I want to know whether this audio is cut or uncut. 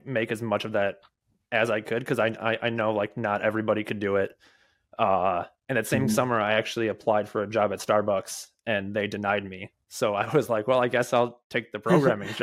uncut